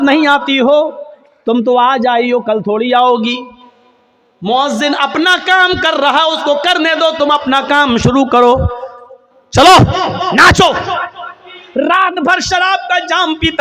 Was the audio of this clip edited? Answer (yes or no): yes